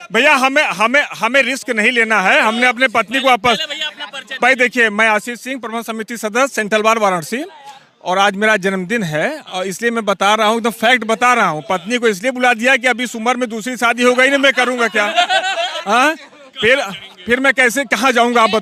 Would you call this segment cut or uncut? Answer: uncut